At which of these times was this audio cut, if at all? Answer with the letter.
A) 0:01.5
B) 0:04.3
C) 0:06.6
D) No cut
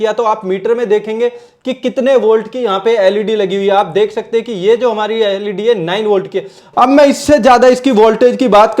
C